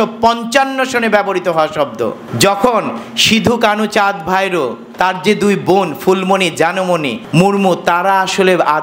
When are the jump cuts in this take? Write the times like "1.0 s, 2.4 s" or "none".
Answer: 2.2 s, 7.2 s